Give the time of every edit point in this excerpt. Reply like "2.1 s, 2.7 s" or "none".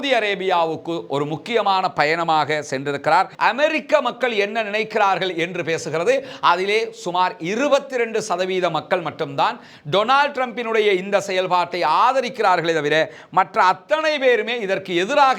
3.3 s